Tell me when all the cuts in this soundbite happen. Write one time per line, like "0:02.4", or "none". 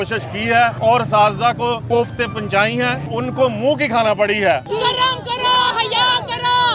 0:00.8
0:01.8
0:03.1
0:04.6